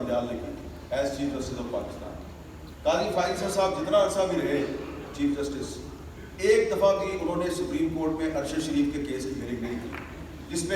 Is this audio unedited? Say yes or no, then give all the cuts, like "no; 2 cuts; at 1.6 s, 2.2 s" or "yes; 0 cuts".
yes; 0 cuts